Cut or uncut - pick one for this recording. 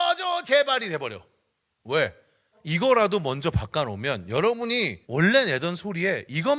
cut